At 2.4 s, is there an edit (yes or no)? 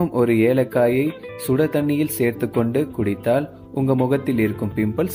no